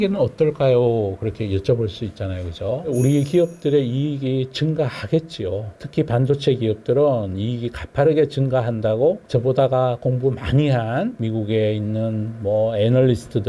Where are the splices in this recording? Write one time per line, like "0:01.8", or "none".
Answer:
none